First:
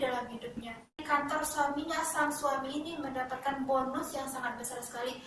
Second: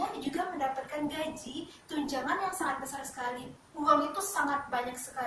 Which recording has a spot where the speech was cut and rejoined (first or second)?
first